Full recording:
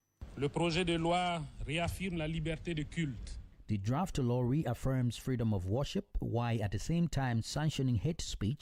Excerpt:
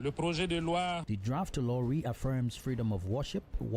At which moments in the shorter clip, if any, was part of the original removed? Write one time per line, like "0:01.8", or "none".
0:01.0